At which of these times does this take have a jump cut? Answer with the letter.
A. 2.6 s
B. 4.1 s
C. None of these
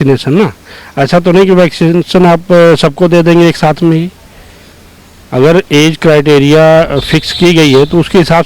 C